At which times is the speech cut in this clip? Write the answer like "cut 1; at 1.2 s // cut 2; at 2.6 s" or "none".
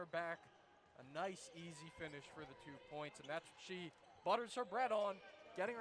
none